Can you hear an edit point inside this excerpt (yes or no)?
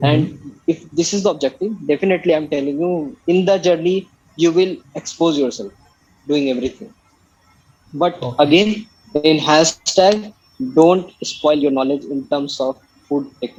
no